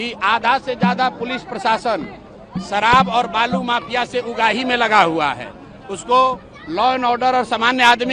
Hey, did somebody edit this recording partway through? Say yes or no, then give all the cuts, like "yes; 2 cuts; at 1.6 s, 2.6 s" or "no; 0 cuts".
no; 0 cuts